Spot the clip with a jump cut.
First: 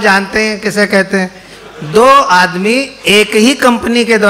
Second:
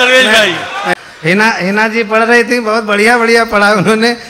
second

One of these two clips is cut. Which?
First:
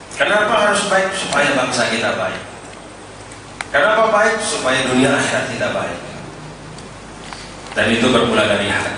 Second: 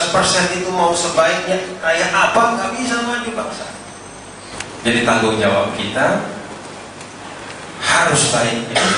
second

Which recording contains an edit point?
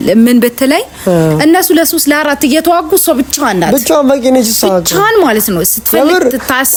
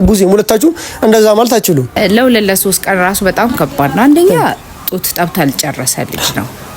second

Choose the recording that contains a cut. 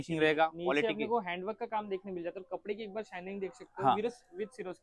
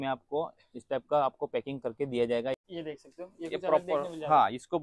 second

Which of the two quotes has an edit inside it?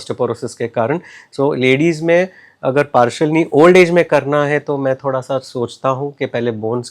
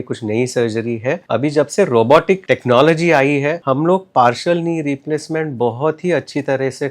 second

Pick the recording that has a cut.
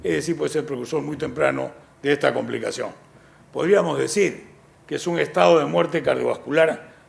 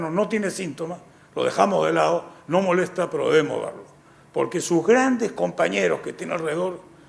first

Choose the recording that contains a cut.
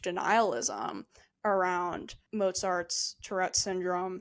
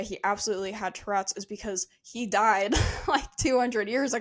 first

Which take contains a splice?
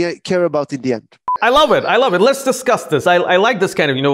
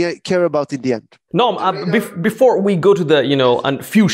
first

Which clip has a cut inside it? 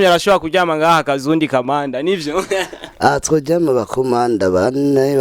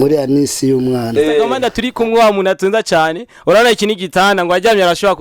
second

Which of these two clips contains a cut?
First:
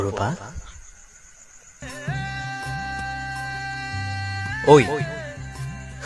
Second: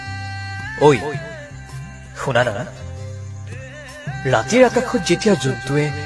first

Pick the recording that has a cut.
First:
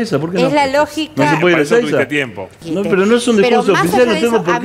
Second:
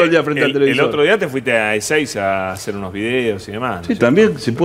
first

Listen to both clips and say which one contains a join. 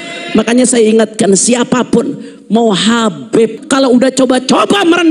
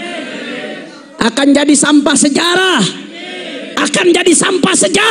first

